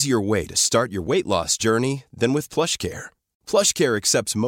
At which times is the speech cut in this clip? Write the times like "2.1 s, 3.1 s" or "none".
none